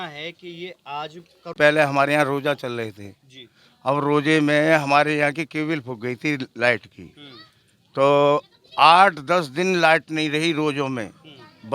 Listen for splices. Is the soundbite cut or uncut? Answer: cut